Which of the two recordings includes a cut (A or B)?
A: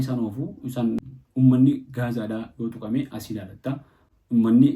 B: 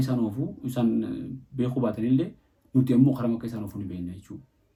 A